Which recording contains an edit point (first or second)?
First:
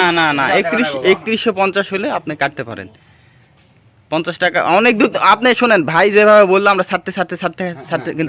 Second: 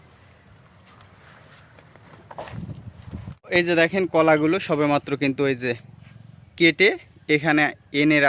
second